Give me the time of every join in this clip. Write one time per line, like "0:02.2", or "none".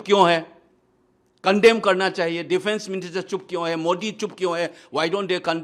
none